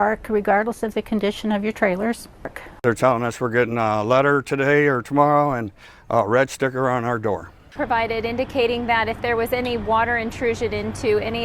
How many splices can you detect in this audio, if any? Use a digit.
2